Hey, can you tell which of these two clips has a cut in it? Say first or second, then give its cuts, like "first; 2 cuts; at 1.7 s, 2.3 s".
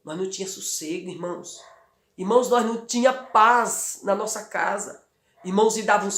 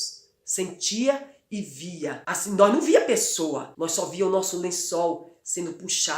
second; 2 cuts; at 2.3 s, 3.7 s